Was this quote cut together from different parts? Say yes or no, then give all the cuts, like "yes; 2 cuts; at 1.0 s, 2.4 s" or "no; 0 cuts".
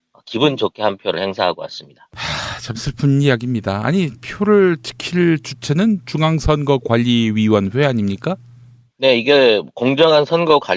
yes; 1 cut; at 4.2 s